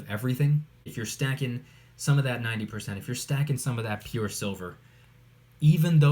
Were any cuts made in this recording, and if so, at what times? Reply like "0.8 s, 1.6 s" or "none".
0.9 s